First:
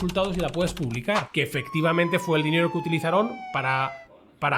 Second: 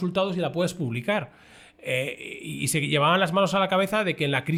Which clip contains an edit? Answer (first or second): first